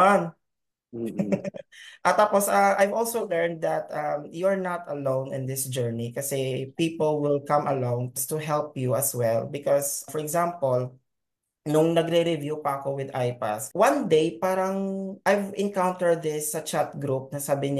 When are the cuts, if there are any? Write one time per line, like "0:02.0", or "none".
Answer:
0:13.6